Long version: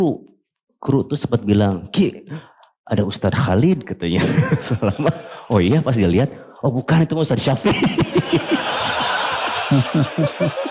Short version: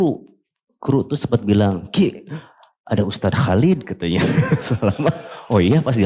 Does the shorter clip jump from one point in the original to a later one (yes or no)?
no